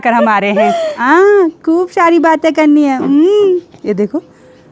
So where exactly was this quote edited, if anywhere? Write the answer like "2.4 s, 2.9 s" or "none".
1.0 s